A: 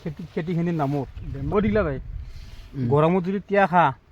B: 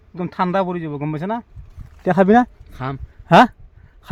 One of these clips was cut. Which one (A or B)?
A